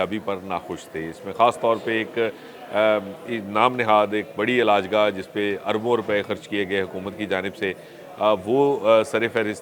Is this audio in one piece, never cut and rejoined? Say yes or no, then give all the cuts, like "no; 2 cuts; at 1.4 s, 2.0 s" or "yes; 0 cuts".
yes; 0 cuts